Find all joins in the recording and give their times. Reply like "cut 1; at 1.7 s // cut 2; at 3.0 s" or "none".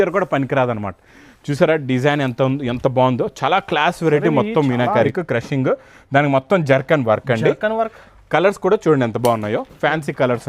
cut 1; at 5.1 s